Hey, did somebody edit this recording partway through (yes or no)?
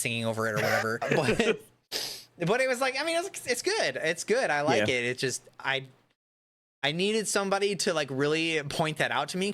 yes